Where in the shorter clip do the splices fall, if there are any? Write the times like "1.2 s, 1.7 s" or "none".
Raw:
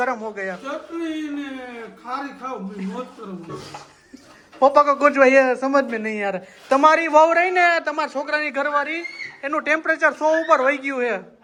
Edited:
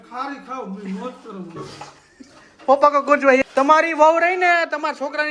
3.4 s